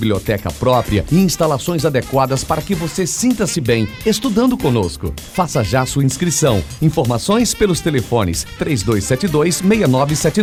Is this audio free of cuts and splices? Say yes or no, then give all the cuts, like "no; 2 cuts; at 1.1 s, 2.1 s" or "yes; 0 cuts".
yes; 0 cuts